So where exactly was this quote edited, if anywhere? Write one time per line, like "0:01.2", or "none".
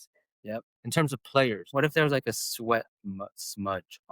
0:01.7